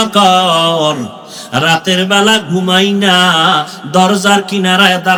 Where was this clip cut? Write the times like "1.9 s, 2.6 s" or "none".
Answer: none